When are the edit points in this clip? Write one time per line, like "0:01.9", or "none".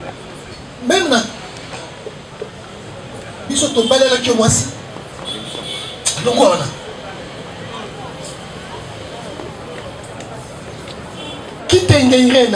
0:11.6